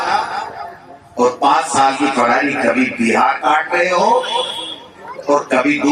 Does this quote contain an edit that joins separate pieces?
no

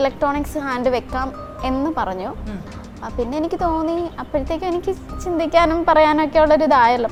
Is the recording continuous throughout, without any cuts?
yes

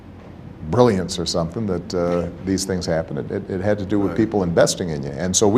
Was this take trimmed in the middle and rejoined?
no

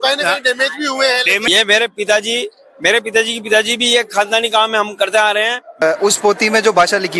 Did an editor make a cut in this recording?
yes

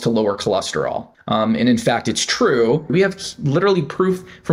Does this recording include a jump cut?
yes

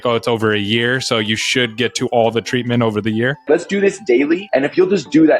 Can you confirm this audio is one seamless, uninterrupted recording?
no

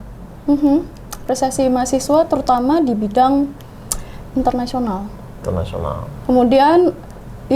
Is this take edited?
no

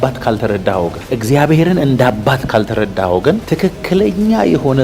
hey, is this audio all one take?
yes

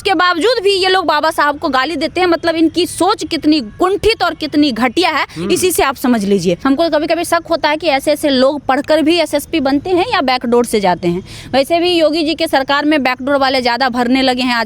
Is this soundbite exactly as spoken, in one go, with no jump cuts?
no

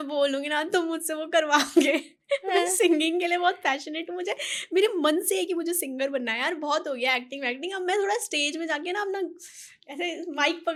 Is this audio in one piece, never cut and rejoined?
yes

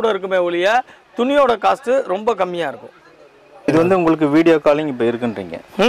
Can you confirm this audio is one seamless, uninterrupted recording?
no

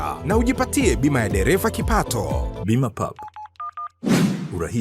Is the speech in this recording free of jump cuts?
no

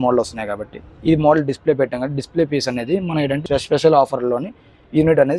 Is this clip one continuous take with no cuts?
no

